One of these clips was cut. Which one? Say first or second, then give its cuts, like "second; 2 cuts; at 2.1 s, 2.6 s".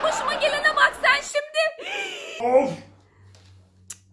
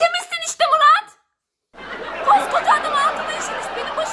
first; 1 cut; at 2.4 s